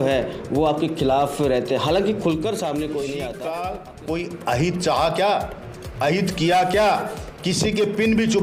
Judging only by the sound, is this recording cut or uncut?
cut